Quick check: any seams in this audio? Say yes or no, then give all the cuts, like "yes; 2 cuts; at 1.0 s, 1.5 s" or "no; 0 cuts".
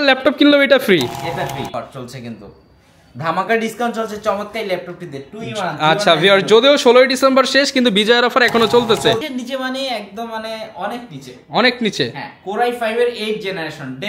yes; 2 cuts; at 1.7 s, 9.2 s